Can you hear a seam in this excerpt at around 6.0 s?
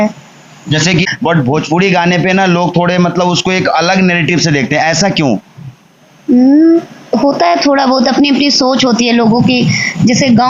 no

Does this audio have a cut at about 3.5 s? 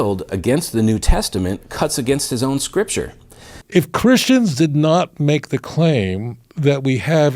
yes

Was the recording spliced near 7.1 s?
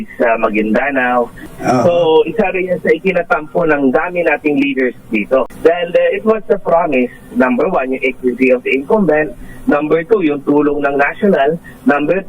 no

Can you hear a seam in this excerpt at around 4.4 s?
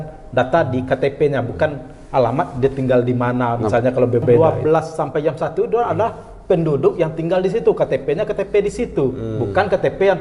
yes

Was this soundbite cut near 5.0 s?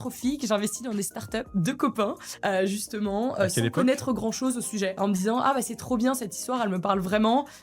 yes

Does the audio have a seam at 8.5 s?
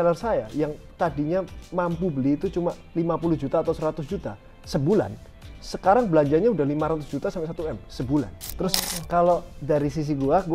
yes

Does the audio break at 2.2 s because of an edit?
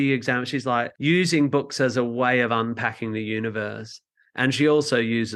no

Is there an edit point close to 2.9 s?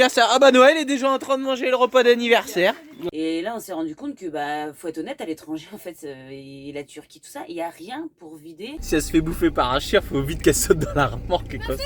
yes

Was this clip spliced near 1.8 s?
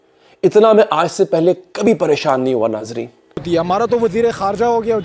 no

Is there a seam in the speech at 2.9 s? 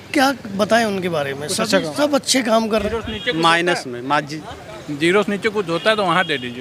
yes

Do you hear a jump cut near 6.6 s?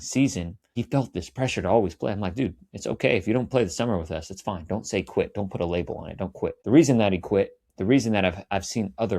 yes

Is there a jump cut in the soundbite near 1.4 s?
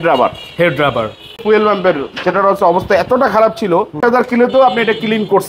yes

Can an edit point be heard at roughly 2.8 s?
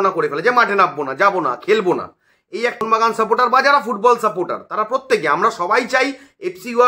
yes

